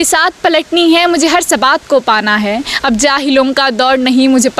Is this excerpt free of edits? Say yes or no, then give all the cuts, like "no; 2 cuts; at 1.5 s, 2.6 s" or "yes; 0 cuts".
yes; 0 cuts